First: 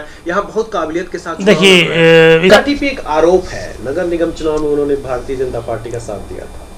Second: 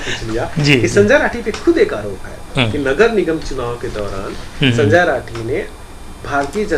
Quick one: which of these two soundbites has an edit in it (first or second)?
first